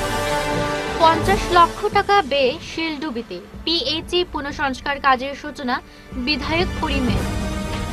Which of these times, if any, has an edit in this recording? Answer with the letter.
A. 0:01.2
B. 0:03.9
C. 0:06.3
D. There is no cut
D